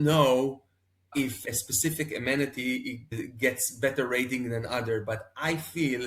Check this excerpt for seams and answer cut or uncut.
cut